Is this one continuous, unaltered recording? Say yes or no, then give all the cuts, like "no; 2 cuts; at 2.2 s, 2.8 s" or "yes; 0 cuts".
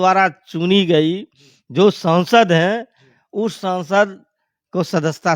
yes; 0 cuts